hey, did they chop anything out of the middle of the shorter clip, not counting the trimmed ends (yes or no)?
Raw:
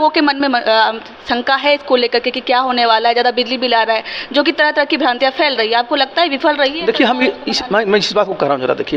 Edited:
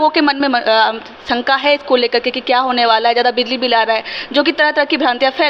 no